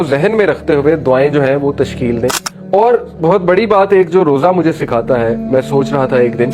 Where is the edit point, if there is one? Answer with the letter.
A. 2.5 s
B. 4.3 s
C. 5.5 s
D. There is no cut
A